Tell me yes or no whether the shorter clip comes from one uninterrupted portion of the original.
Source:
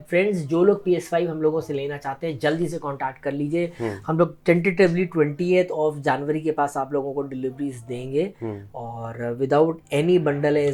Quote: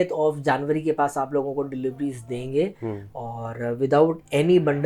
yes